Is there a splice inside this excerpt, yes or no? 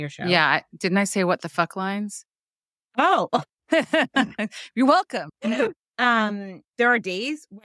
yes